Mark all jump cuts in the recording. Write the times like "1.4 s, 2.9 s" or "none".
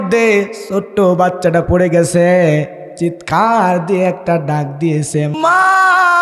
2.8 s, 5.3 s